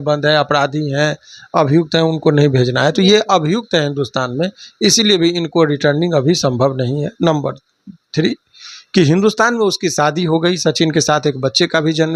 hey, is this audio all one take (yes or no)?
yes